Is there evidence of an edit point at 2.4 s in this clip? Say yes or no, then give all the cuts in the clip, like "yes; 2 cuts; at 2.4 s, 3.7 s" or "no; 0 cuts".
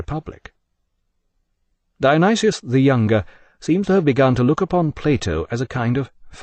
no; 1 cut; at 4.0 s